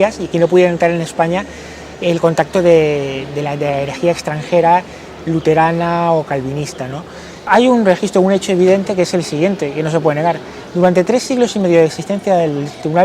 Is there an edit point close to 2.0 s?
no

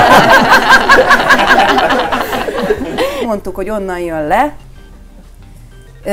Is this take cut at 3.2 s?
yes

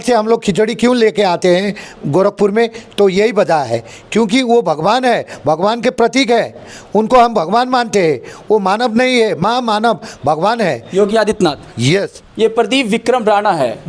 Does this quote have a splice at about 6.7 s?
no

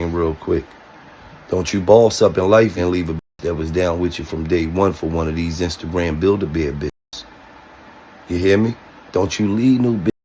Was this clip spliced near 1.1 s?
no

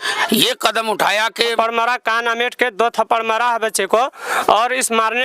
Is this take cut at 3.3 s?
no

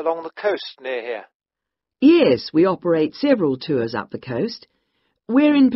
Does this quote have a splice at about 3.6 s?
yes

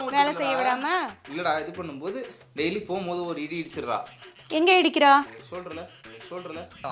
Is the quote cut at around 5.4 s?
no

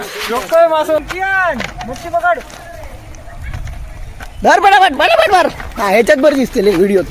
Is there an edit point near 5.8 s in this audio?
no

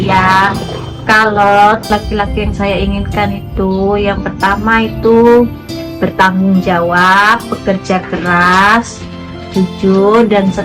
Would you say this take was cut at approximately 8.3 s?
no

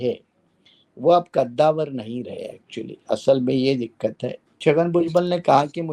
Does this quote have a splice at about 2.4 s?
no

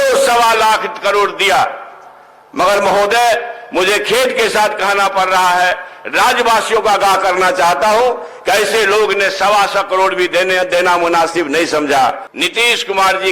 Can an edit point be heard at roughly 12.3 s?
yes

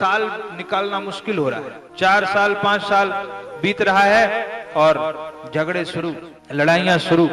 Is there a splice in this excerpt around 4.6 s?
no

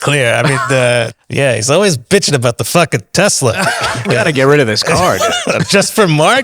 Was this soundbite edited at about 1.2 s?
yes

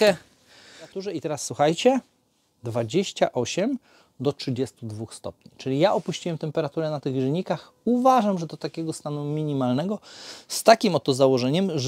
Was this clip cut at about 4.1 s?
no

